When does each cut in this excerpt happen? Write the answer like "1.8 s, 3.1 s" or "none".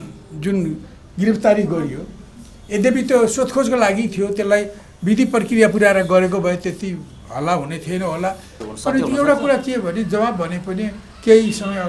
8.5 s